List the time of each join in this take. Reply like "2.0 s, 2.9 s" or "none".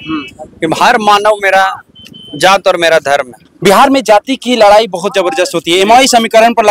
3.4 s